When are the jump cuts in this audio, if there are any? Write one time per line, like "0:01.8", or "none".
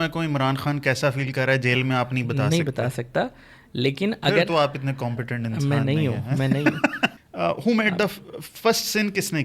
0:07.2